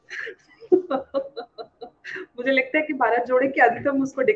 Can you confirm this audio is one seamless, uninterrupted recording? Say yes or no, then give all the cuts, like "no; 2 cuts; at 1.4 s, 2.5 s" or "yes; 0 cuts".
yes; 0 cuts